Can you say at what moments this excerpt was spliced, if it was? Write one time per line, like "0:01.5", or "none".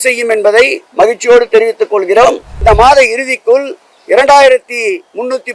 0:02.5